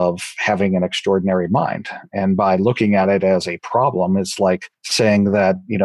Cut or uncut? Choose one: cut